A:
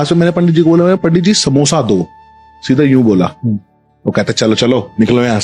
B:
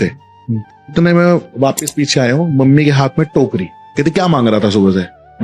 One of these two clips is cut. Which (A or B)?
B